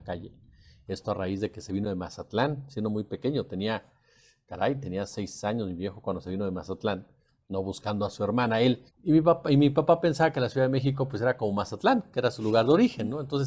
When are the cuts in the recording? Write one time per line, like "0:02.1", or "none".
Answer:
0:08.9